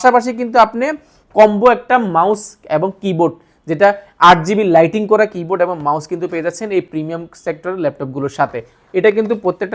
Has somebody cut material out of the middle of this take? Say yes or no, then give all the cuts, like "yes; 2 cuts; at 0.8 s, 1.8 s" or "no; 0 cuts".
no; 0 cuts